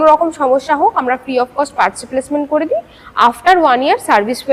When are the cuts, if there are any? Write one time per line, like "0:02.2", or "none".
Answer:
none